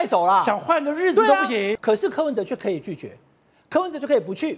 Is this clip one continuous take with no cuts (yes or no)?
no